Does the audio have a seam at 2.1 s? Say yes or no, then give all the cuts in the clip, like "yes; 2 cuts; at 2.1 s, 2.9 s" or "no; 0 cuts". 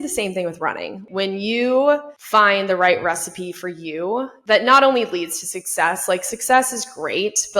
yes; 3 cuts; at 1.0 s, 2.1 s, 4.3 s